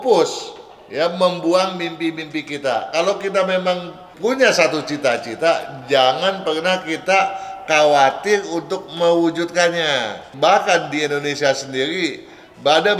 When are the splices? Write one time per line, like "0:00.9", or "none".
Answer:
0:04.0
0:10.2

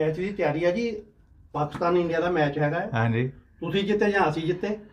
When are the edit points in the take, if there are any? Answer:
none

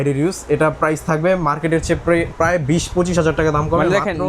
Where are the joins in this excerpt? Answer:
none

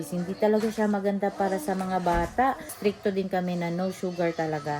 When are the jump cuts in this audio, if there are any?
0:02.7

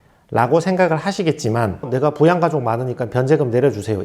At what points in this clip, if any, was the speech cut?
0:01.8

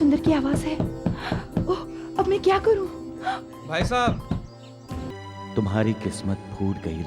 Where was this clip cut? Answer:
0:05.1

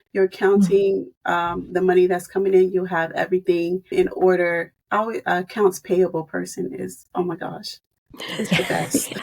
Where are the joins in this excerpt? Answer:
0:03.9
0:04.8

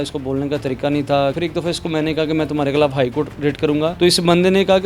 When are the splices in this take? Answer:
0:01.4
0:03.9

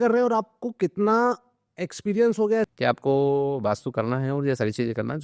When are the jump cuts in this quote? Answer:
0:02.7

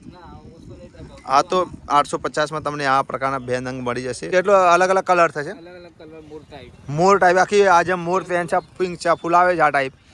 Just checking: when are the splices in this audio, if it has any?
0:04.3

